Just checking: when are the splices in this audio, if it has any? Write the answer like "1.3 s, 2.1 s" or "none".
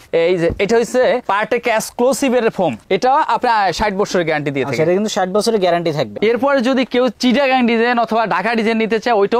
2.8 s, 6.1 s